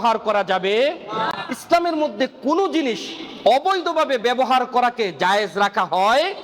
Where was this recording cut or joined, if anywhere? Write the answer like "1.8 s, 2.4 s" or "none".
none